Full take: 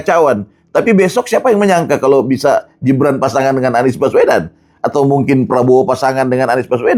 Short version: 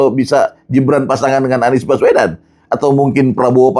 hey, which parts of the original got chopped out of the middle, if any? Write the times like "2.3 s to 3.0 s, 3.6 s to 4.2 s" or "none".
none